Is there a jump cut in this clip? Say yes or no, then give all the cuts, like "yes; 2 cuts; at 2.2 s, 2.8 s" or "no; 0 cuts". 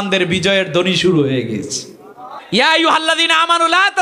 yes; 1 cut; at 2.3 s